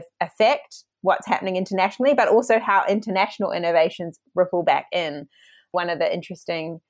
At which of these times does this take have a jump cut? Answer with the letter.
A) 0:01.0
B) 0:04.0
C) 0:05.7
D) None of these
C